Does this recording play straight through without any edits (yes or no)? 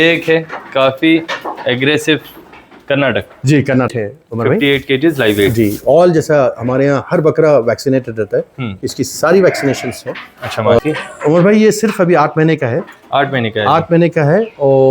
no